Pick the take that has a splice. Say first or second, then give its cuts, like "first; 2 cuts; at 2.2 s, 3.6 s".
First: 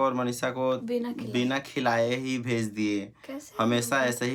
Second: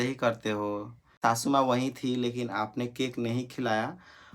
second; 1 cut; at 1.1 s